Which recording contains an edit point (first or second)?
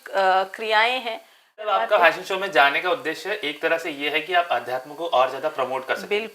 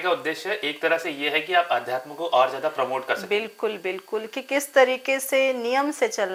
first